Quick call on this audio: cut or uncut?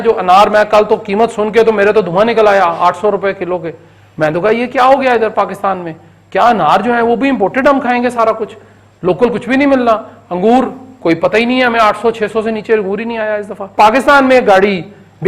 cut